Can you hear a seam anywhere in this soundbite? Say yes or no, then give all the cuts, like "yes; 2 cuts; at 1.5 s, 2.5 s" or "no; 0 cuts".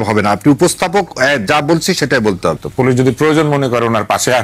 yes; 1 cut; at 2.6 s